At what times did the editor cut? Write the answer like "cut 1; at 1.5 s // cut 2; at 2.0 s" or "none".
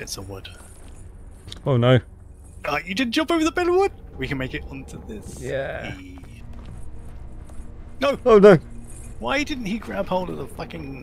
none